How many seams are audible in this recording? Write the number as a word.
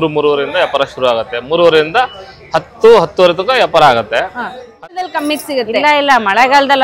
one